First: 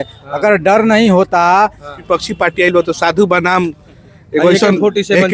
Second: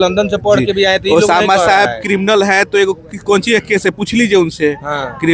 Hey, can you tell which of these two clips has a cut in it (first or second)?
first